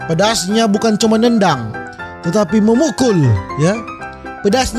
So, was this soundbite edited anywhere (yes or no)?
no